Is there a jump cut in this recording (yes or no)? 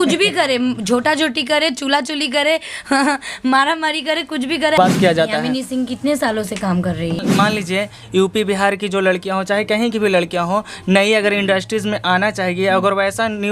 yes